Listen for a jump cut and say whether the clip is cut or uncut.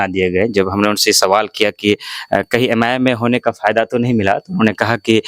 uncut